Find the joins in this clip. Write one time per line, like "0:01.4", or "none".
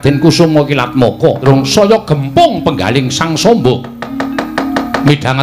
0:01.4